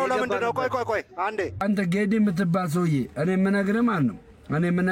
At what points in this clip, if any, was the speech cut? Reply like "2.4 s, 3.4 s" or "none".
1.6 s

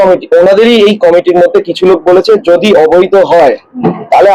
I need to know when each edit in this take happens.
none

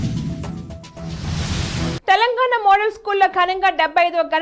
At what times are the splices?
2.0 s

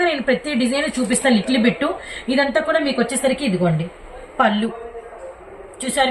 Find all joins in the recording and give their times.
none

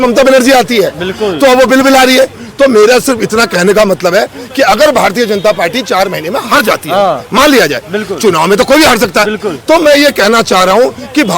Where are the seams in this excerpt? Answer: none

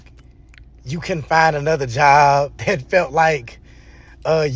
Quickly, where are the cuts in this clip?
3.0 s

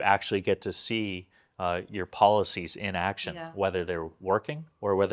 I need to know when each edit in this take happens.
none

